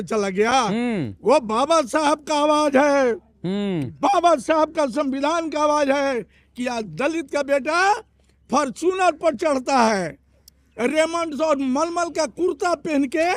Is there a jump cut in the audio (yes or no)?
no